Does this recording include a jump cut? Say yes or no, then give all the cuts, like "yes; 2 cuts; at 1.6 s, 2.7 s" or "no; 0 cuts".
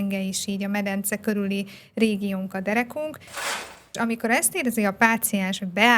yes; 1 cut; at 3.4 s